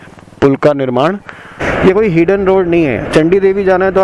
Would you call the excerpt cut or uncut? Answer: cut